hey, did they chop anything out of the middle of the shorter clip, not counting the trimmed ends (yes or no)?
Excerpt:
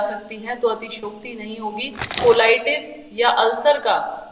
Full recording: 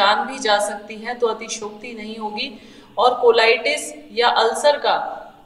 yes